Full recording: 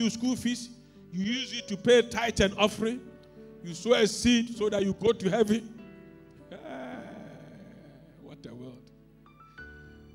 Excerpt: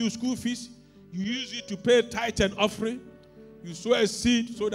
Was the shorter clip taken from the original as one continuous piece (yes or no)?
yes